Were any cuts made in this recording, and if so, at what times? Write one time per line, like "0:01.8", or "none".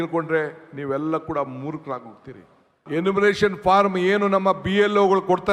0:02.8